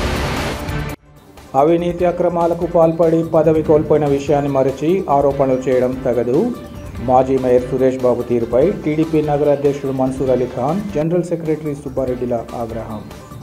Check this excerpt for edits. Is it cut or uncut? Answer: cut